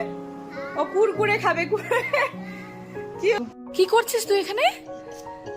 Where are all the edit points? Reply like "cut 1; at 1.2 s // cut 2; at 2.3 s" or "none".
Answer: cut 1; at 3.4 s